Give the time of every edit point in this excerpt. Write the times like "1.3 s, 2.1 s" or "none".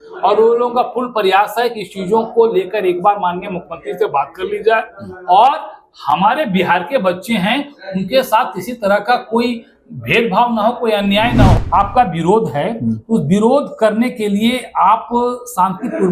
11.5 s